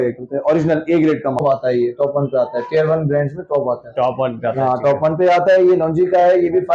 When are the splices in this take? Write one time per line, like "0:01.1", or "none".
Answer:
0:01.4